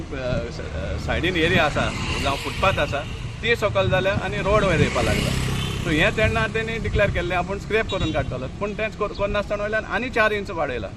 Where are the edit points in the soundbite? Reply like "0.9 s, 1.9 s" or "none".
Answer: none